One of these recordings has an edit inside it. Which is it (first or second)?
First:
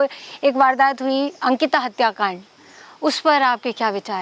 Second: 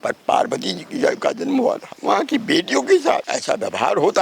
second